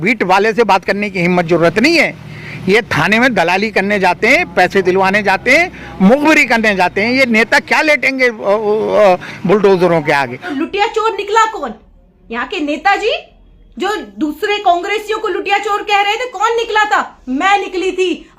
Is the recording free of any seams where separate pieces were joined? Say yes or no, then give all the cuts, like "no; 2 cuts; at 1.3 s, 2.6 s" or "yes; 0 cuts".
no; 1 cut; at 10.4 s